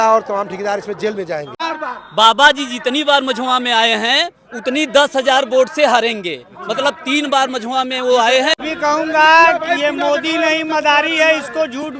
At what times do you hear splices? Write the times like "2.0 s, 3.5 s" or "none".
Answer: 1.6 s, 8.5 s